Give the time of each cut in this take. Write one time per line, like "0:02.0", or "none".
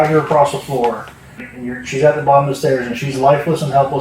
0:01.4